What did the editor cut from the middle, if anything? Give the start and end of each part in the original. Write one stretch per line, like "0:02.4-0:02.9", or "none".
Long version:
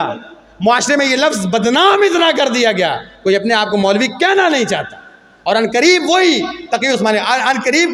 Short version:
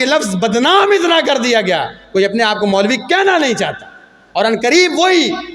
none